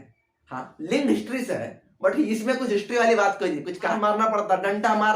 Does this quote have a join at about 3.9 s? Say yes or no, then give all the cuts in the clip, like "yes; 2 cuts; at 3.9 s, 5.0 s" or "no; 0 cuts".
yes; 1 cut; at 3.9 s